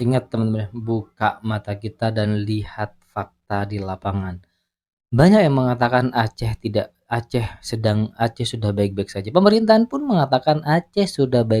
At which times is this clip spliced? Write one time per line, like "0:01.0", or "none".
none